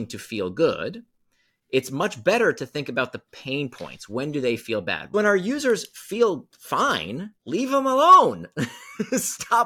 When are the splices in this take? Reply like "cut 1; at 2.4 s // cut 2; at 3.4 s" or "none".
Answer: cut 1; at 5.1 s